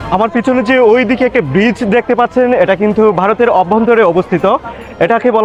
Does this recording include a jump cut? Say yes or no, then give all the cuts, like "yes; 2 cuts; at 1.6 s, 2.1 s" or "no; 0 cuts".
no; 0 cuts